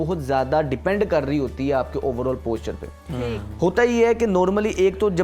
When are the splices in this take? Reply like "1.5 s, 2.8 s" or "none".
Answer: none